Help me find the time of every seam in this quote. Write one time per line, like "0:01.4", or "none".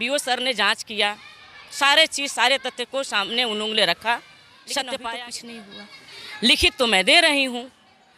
0:05.2